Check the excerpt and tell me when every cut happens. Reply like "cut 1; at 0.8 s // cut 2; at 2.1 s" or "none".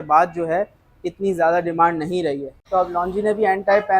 cut 1; at 2.5 s